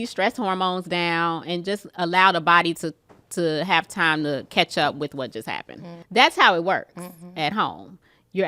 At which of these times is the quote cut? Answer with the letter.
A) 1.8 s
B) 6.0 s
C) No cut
B